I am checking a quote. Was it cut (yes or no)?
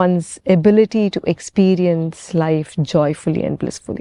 no